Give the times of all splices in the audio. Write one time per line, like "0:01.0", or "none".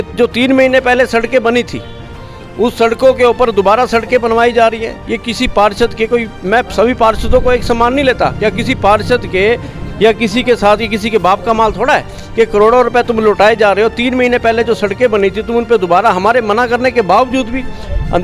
none